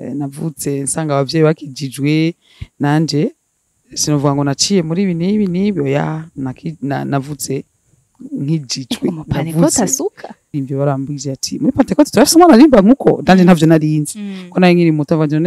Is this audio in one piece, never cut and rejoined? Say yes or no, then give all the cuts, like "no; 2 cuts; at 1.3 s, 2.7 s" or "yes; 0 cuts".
no; 1 cut; at 10.6 s